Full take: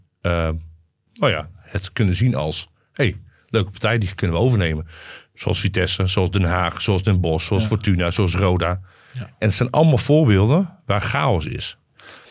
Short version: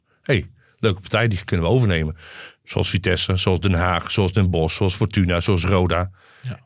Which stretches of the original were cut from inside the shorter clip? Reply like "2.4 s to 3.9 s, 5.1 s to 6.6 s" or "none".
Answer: none